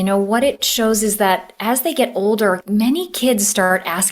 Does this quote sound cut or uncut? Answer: cut